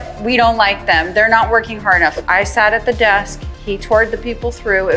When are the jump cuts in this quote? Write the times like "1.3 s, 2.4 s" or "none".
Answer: 2.2 s